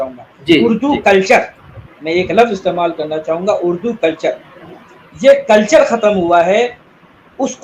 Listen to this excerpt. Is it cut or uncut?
uncut